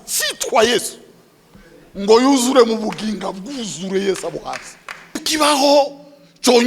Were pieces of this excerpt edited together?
yes; 1 cut; at 5.2 s

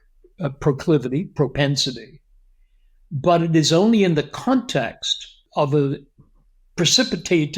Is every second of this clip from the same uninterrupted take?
no; 1 cut; at 5.4 s

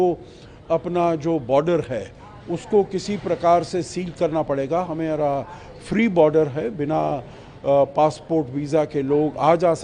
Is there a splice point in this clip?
no; 0 cuts

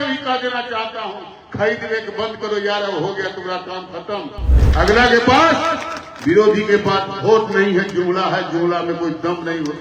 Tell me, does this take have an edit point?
yes; 1 cut; at 4.6 s

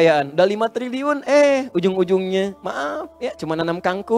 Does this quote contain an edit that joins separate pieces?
no; 0 cuts

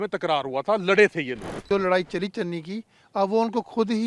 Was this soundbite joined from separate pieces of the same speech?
yes; 1 cut; at 1.6 s

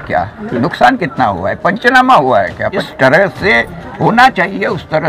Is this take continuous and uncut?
no; 1 cut; at 2.9 s

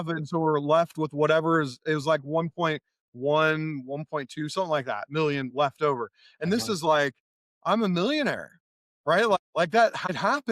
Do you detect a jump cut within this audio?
no; 0 cuts

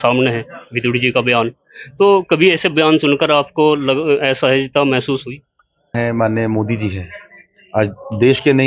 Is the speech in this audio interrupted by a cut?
yes; 1 cut; at 5.9 s

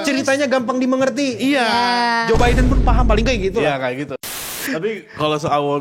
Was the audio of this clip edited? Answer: yes; 1 cut; at 4.4 s

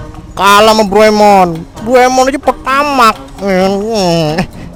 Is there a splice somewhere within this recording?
no; 0 cuts

